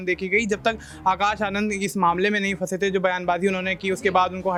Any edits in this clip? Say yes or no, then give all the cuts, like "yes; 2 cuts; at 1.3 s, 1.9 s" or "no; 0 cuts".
no; 0 cuts